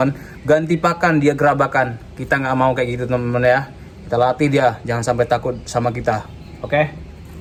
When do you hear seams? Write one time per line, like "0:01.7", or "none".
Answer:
none